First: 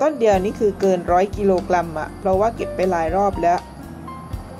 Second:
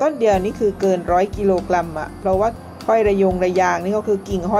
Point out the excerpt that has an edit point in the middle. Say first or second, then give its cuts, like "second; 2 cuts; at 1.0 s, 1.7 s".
second; 1 cut; at 2.6 s